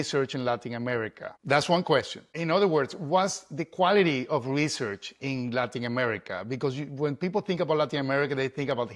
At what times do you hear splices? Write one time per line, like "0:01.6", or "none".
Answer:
0:01.3
0:02.4